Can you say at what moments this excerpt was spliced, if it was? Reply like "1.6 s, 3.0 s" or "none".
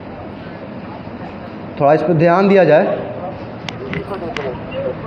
none